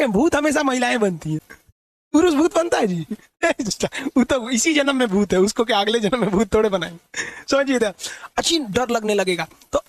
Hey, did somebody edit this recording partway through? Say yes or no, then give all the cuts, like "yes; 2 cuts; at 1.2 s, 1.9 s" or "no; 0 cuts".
no; 0 cuts